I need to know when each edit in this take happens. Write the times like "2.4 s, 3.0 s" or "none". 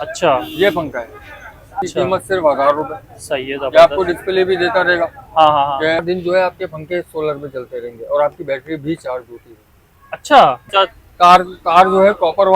1.8 s, 6.0 s, 10.7 s